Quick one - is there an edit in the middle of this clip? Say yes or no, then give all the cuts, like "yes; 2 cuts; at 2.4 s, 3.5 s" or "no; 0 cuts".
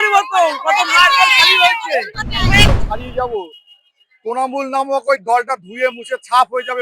yes; 1 cut; at 2.6 s